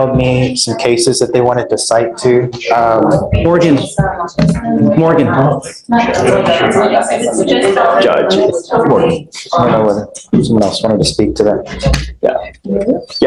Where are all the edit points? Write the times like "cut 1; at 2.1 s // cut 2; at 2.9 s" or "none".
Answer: none